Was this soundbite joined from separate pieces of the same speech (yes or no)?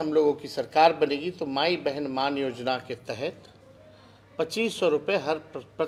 no